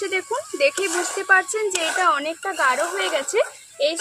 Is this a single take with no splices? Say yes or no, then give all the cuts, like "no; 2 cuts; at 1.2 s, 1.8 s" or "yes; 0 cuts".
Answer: yes; 0 cuts